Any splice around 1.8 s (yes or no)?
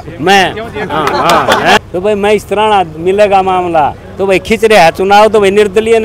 yes